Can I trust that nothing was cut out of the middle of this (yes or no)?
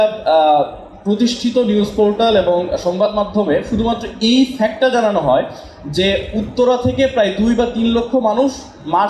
yes